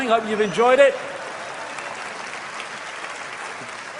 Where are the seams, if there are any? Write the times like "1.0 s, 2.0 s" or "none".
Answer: none